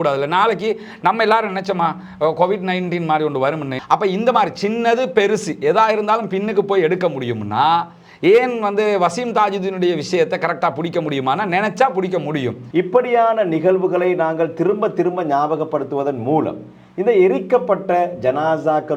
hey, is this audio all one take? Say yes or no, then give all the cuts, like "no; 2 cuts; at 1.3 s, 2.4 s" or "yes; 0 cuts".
no; 2 cuts; at 3.7 s, 12.6 s